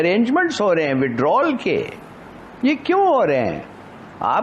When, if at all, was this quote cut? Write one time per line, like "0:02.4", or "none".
none